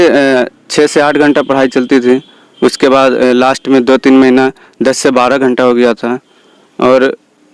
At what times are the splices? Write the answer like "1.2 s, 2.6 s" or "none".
none